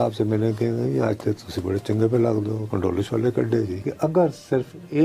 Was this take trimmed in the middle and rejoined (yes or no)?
yes